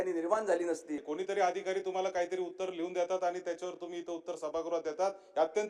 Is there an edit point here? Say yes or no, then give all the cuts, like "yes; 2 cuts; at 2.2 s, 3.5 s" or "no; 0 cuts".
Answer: yes; 1 cut; at 1.1 s